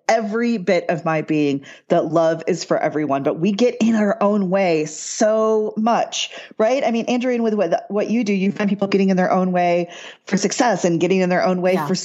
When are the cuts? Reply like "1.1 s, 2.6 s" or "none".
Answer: none